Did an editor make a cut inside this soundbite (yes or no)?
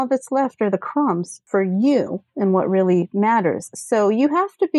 yes